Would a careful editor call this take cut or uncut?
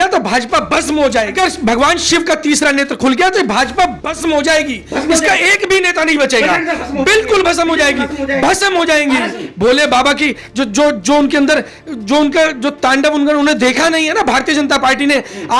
cut